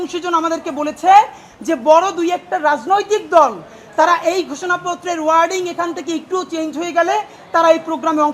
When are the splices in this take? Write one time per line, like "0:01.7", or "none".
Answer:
none